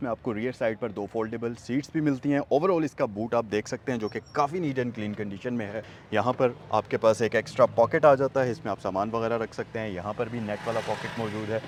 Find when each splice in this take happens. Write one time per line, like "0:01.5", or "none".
none